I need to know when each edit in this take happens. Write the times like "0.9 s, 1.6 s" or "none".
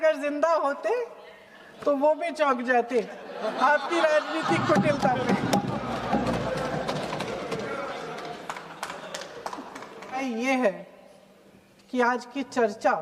10.2 s

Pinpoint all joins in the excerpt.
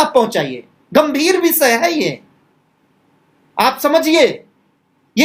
none

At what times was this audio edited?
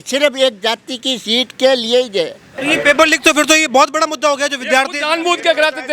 2.5 s

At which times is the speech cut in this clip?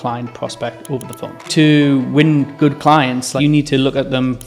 1.4 s, 3.3 s

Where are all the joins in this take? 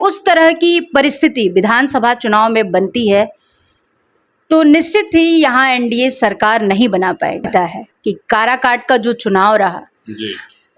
7.5 s

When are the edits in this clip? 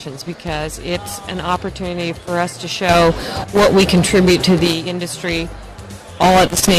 1.9 s

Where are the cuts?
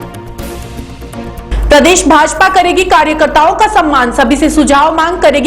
1.0 s

